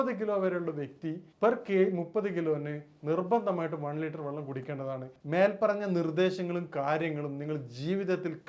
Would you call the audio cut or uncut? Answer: cut